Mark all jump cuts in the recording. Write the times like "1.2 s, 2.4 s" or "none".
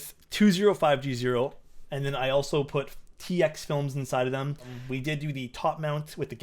4.8 s